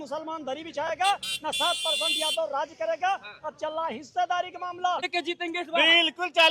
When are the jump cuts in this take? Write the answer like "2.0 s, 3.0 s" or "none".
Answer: 5.1 s